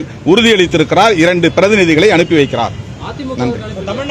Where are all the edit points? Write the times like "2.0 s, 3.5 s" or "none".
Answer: none